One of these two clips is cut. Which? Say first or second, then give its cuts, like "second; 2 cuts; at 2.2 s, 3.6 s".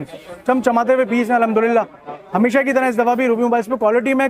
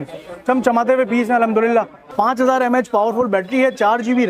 second; 1 cut; at 2.0 s